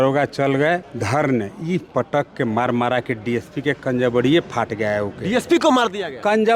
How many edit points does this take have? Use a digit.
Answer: 1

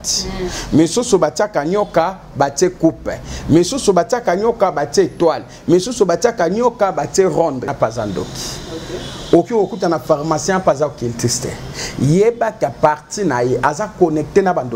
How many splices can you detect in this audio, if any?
1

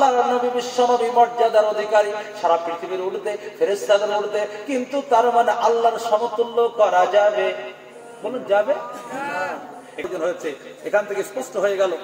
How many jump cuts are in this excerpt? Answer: 1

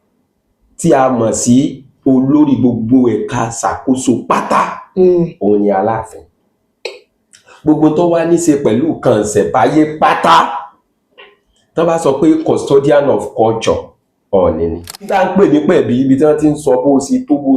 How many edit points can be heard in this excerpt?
1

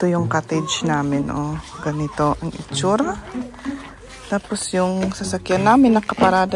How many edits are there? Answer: 0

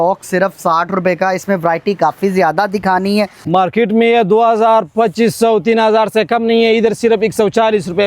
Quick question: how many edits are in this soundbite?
1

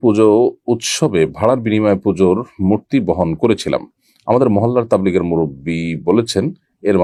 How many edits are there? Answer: 0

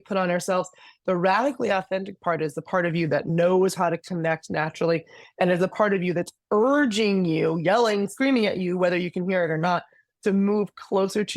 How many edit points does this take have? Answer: 1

